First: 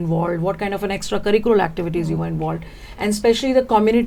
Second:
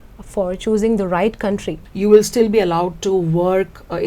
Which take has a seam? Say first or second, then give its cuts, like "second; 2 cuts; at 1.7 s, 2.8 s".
second; 1 cut; at 1.8 s